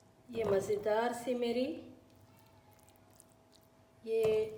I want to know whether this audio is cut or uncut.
uncut